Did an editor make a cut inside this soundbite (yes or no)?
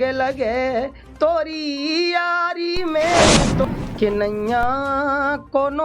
yes